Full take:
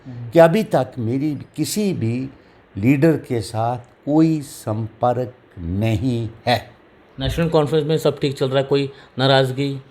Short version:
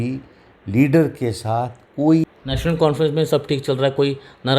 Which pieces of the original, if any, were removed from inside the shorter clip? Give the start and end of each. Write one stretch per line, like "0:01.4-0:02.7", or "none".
0:04.5-0:07.1

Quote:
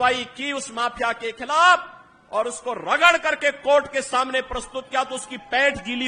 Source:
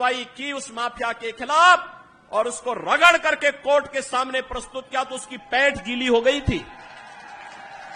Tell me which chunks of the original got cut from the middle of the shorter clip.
none

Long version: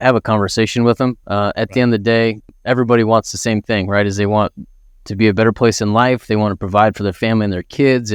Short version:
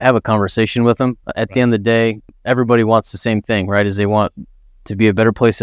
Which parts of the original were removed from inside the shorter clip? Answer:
0:01.3-0:01.5

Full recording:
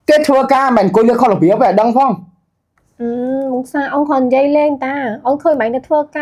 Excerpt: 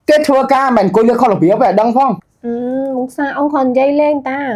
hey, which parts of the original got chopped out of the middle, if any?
0:02.3-0:02.9

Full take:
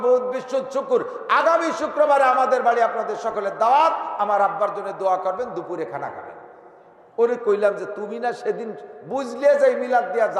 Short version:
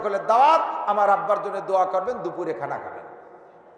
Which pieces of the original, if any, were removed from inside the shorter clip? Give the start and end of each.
none

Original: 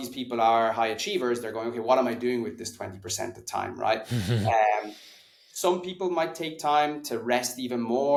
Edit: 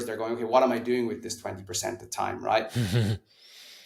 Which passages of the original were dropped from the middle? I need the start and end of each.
none

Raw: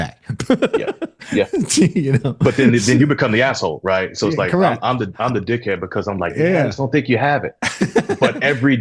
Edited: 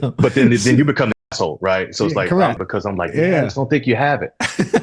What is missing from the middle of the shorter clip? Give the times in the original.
0:04.8-0:05.8

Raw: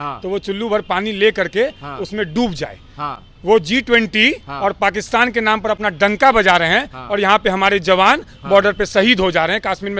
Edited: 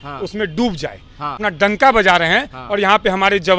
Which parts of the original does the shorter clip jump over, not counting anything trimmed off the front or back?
0:03.2-0:05.8

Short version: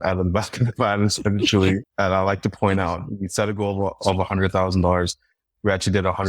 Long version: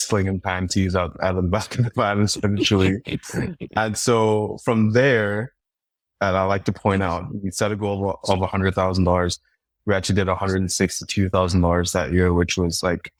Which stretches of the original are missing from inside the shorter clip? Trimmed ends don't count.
0:03.0-0:06.1

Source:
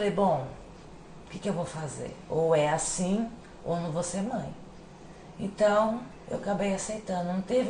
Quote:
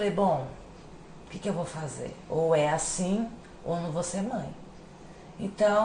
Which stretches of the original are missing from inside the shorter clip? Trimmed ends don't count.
none

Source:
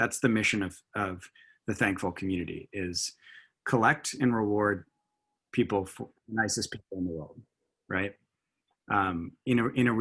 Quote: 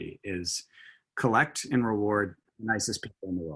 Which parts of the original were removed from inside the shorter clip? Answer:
0:05.0-0:06.2

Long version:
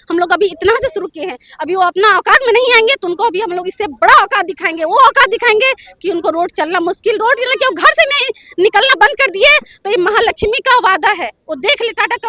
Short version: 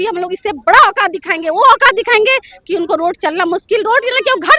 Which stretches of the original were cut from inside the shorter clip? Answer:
none

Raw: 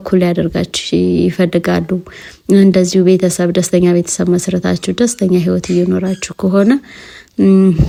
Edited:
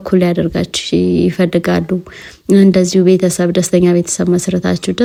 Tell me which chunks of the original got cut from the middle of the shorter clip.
none

